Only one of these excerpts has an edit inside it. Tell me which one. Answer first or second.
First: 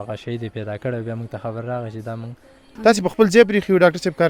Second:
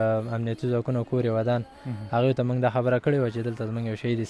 first